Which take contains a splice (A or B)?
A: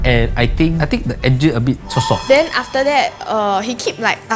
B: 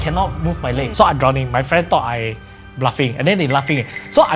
A